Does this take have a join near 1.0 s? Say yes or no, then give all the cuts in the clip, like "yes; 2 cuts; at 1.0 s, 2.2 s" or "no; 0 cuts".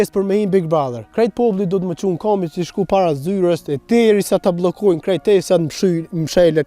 yes; 1 cut; at 1.0 s